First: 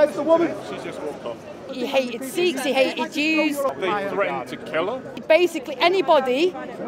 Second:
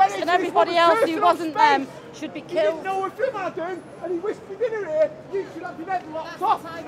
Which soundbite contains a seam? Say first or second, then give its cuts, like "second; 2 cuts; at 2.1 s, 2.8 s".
first; 3 cuts; at 1.7 s, 3.7 s, 5.2 s